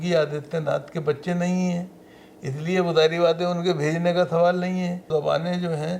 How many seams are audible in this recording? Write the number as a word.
one